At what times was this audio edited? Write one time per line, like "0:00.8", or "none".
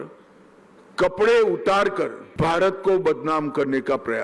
0:02.2